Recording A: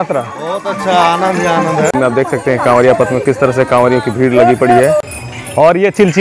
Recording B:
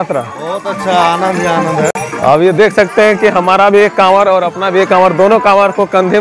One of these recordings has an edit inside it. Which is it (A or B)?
A